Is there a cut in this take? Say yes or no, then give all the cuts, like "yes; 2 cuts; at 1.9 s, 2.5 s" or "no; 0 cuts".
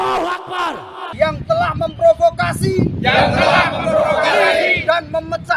yes; 1 cut; at 1.1 s